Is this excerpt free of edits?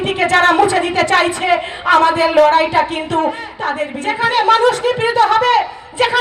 no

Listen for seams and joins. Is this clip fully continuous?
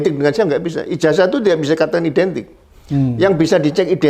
yes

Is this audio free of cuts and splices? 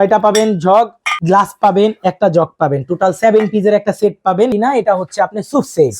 no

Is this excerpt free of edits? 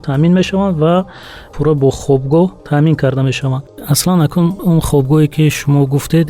no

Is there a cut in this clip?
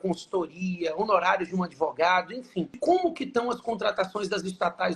yes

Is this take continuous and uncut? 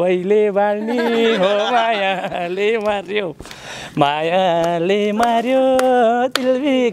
yes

